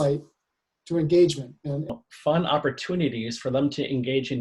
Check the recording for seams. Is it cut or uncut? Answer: cut